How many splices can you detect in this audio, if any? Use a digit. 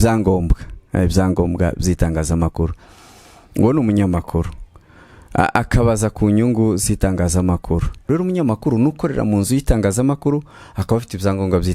1